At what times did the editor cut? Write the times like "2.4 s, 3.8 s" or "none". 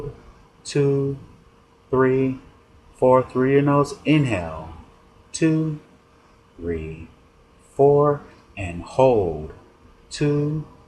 none

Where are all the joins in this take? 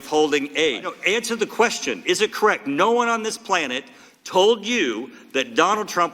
0.9 s

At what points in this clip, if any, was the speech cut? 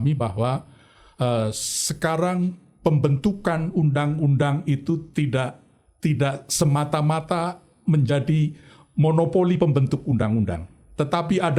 none

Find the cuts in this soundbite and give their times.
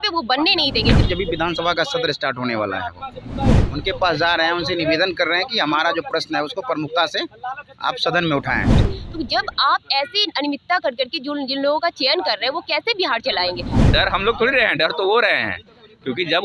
1.0 s, 3.6 s, 8.9 s, 13.8 s

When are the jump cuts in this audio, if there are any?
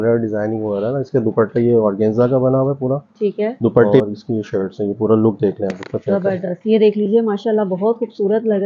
4.0 s

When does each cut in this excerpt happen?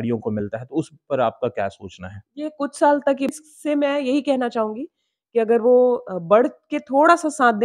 3.3 s

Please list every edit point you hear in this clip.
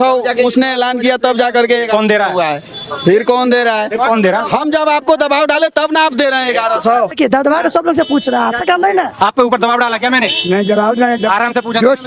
7.2 s

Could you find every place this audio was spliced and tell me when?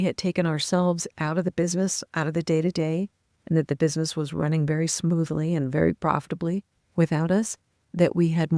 none

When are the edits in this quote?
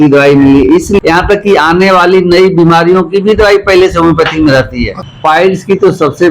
1.0 s, 5.0 s

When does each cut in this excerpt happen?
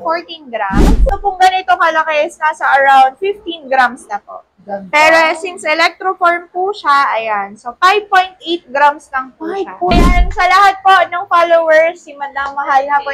1.1 s, 10.2 s

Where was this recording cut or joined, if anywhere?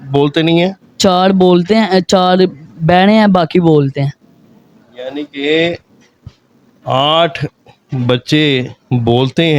none

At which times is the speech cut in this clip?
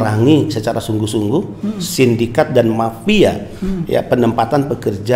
none

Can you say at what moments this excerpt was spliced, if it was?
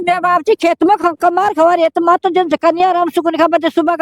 none

